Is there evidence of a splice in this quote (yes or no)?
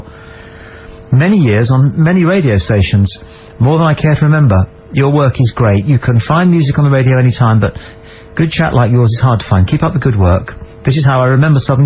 no